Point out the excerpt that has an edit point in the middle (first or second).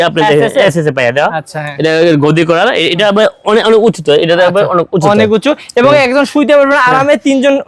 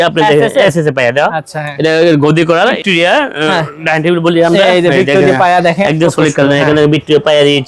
second